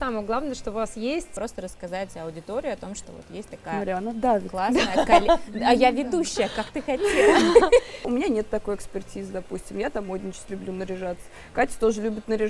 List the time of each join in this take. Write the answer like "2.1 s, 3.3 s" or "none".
1.3 s, 8.1 s